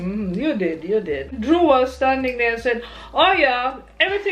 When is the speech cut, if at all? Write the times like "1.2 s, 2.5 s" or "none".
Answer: 1.2 s